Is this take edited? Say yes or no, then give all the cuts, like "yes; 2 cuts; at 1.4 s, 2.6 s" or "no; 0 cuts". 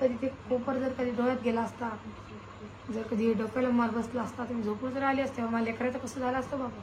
no; 0 cuts